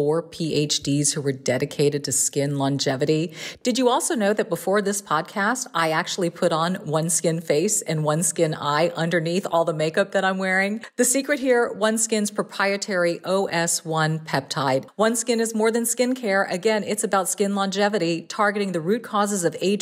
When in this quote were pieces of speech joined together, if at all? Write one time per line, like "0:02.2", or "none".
0:10.8
0:14.9